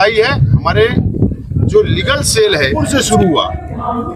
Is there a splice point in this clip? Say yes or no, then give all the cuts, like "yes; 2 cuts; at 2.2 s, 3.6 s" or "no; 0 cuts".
yes; 1 cut; at 2.8 s